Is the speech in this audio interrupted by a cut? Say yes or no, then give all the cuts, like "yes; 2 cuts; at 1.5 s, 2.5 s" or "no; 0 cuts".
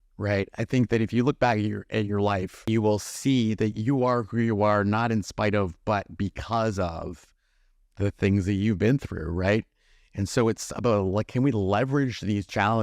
yes; 1 cut; at 2.6 s